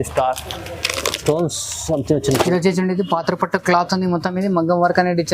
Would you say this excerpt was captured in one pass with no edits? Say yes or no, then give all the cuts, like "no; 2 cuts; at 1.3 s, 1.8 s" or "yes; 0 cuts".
no; 1 cut; at 2.5 s